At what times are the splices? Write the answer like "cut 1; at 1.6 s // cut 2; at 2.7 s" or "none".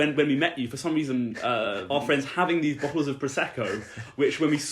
cut 1; at 1.8 s